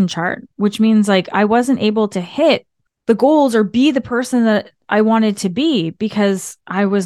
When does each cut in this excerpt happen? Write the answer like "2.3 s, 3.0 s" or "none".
none

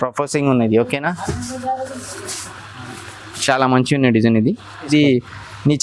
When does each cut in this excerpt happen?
4.9 s

